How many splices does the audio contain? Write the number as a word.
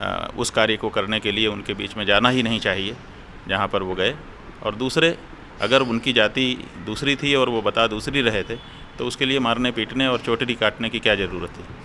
zero